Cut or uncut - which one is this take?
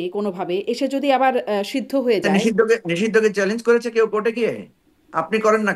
cut